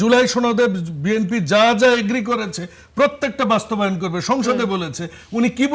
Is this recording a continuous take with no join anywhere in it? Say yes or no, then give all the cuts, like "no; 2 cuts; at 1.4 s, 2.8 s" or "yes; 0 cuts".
yes; 0 cuts